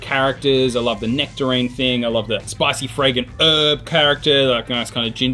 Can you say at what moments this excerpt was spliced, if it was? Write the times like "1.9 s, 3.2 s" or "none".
2.5 s